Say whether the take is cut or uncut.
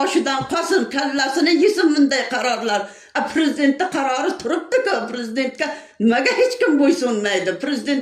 uncut